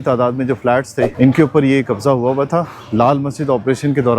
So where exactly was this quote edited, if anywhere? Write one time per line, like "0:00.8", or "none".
0:01.1